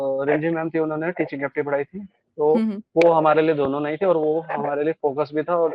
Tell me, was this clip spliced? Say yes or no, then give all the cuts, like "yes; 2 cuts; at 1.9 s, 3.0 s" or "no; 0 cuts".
no; 0 cuts